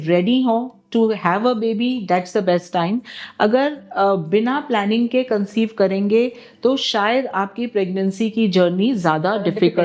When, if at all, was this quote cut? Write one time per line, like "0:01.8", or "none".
none